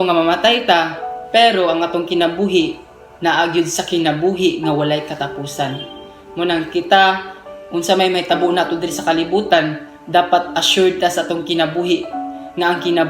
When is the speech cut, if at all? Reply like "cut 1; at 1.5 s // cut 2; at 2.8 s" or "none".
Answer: none

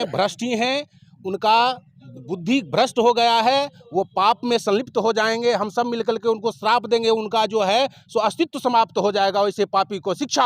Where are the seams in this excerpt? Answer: none

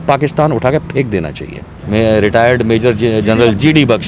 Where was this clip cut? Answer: cut 1; at 1.7 s

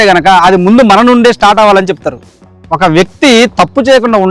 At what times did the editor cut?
cut 1; at 2.3 s

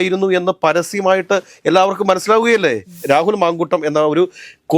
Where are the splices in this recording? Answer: cut 1; at 3.0 s

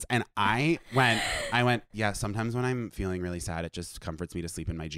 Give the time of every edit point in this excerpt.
none

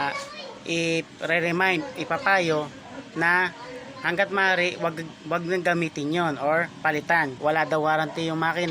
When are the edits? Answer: cut 1; at 7.3 s

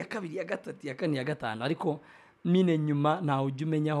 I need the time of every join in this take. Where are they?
none

